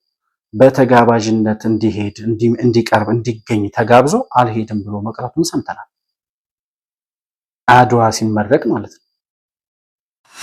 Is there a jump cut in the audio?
no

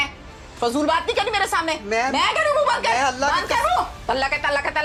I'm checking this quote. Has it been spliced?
no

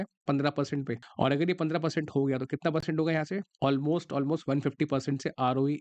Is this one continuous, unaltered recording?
no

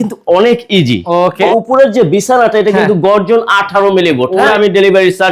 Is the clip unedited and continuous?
no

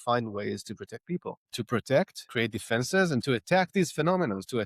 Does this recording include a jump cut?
yes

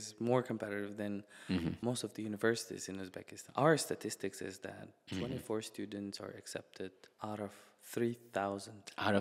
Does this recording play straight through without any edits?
no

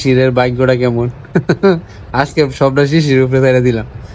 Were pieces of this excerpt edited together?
no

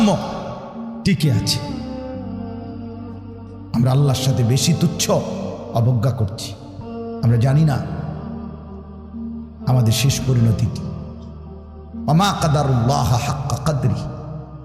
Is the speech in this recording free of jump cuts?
no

